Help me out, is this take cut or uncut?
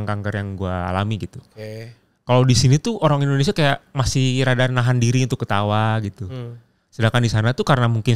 uncut